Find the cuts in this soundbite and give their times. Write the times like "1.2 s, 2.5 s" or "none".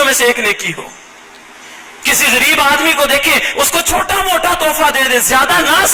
none